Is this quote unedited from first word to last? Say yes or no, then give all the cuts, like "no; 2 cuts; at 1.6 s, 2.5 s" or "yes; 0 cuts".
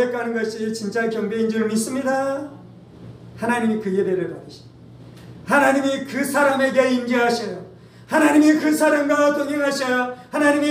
yes; 0 cuts